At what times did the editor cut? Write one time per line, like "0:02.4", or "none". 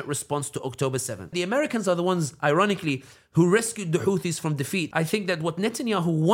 0:01.3
0:04.9